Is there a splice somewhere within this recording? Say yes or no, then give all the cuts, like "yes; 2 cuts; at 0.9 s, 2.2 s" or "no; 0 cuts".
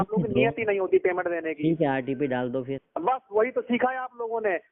yes; 1 cut; at 2.8 s